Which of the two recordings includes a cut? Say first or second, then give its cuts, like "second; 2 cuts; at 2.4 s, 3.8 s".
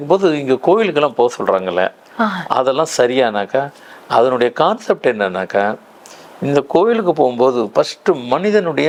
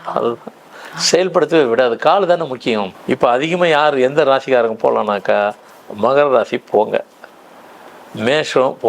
second; 1 cut; at 2.9 s